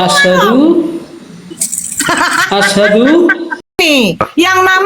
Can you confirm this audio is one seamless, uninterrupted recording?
no; 1 cut; at 3.8 s

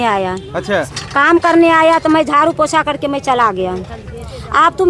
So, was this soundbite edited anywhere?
no; 0 cuts

